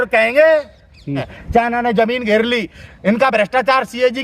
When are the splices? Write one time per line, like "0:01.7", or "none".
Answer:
0:01.2